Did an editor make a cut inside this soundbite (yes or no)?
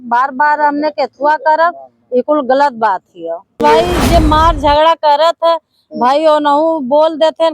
yes